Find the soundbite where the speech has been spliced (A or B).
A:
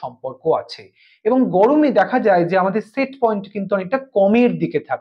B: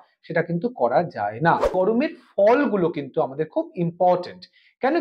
B